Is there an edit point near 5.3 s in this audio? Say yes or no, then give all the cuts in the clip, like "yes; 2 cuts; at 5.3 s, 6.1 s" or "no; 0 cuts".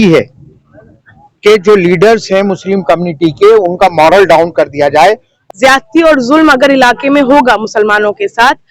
yes; 1 cut; at 5.3 s